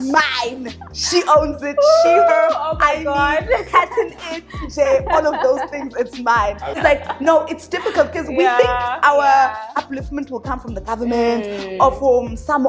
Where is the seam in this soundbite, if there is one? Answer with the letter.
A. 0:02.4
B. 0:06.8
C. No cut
B